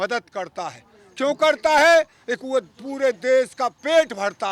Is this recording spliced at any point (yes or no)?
no